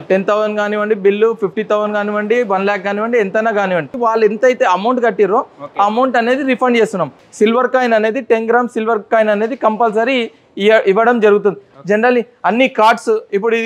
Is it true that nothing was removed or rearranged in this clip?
no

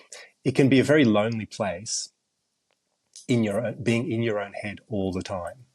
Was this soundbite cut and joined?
no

